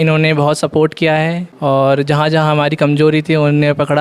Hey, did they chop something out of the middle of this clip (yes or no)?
no